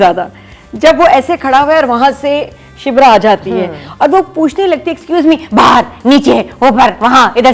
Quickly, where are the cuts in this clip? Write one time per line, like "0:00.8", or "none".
none